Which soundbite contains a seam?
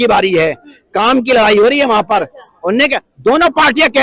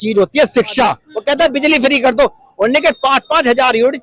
second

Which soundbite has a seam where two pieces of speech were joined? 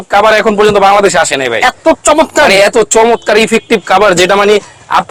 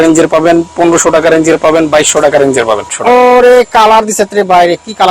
second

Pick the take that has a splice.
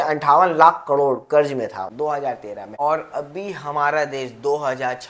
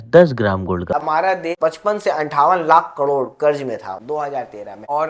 second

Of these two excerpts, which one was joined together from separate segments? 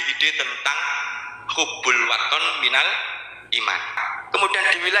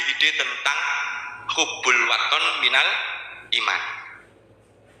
first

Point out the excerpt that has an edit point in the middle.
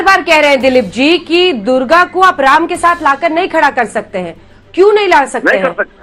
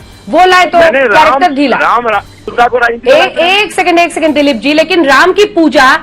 second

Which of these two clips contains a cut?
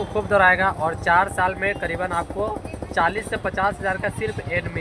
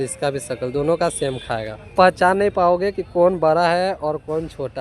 second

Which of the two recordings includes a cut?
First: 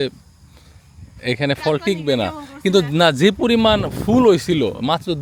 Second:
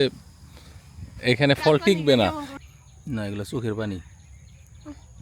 second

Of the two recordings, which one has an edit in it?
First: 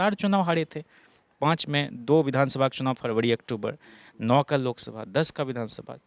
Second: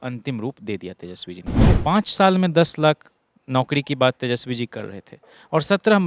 second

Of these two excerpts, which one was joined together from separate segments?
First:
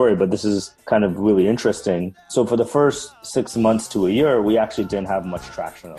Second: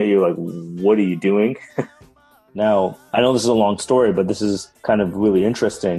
second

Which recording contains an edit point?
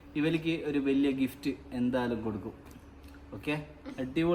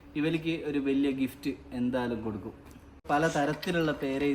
second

